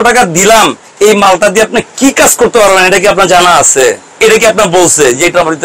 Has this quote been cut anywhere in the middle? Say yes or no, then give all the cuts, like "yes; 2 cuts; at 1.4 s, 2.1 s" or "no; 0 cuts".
no; 0 cuts